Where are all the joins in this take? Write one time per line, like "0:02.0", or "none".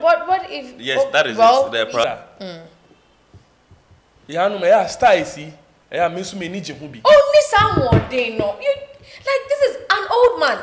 0:02.0